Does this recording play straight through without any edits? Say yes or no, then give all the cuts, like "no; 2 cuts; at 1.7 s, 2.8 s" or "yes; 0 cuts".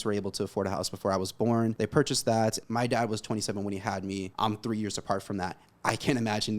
no; 3 cuts; at 1.8 s, 2.6 s, 4.3 s